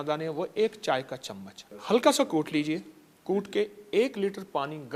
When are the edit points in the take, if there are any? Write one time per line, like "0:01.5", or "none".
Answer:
none